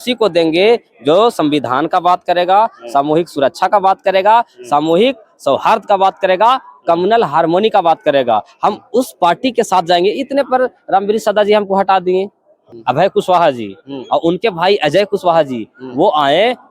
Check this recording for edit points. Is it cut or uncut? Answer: cut